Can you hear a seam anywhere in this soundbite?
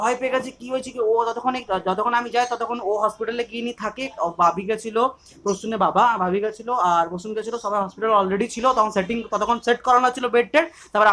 no; 0 cuts

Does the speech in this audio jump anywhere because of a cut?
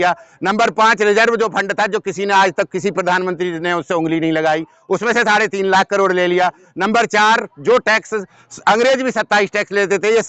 no; 0 cuts

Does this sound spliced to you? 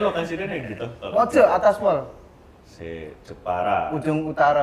no; 0 cuts

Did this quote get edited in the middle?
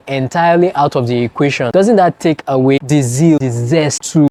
no; 0 cuts

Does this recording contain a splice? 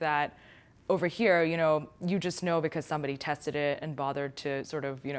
no; 0 cuts

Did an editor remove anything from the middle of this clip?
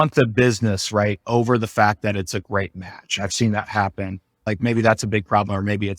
yes; 1 cut; at 4.5 s

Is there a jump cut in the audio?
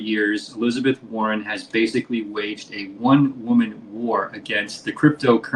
no; 0 cuts

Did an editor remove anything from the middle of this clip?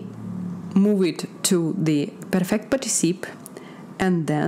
no; 0 cuts

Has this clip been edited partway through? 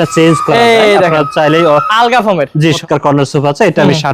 yes; 1 cut; at 2.7 s

